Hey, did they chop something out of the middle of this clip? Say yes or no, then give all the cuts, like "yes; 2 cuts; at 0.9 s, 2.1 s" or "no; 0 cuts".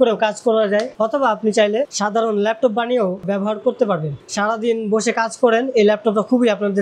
yes; 3 cuts; at 0.9 s, 1.9 s, 4.2 s